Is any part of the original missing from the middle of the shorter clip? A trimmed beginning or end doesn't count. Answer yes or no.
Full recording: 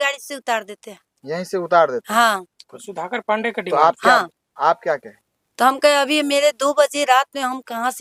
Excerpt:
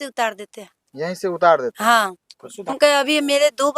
yes